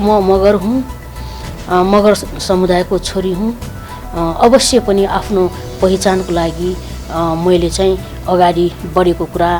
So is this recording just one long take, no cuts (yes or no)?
yes